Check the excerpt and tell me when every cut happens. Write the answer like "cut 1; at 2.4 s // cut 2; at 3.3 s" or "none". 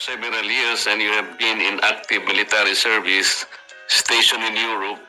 none